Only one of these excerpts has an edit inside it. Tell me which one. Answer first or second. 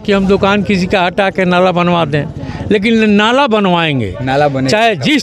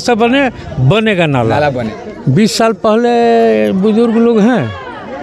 second